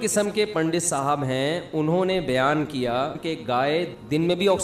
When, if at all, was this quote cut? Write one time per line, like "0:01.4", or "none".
0:03.6